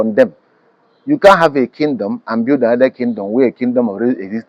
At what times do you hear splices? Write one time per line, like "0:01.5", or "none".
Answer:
none